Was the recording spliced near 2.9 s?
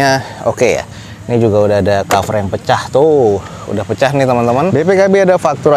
no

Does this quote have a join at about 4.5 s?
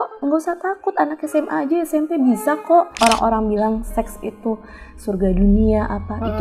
no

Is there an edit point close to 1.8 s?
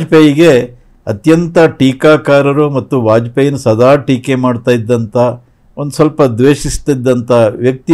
no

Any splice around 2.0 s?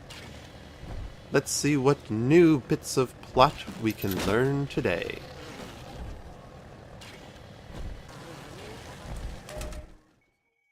no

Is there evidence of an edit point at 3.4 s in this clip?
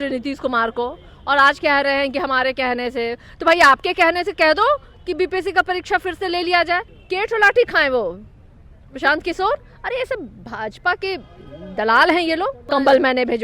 no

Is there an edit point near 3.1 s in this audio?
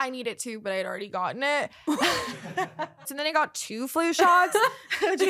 yes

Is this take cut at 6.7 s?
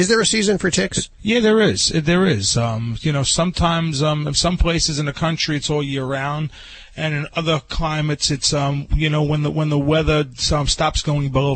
no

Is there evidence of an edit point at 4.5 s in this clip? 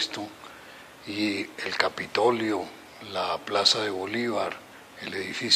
yes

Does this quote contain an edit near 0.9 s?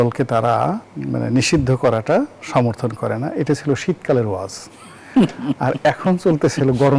yes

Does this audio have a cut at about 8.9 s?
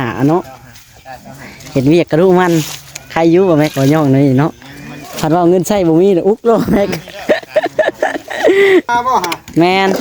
yes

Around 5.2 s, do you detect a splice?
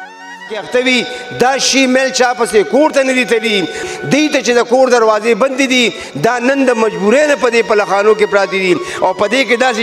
no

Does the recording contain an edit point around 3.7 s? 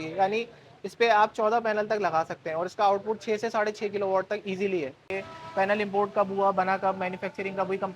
no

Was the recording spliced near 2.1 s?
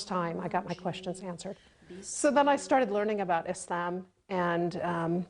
yes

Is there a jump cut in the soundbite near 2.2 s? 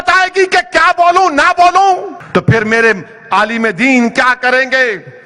yes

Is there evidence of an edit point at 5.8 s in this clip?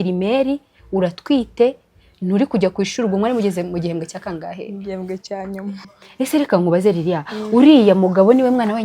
yes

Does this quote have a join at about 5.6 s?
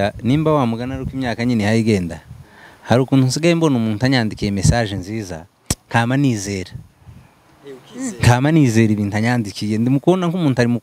no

